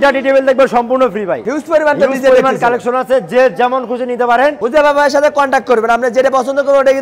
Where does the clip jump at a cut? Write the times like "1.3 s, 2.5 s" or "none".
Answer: 1.4 s, 4.6 s